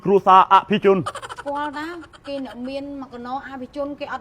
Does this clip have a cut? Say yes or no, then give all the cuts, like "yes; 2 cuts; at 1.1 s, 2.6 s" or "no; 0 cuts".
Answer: yes; 1 cut; at 1.3 s